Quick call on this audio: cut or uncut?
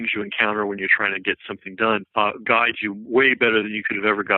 uncut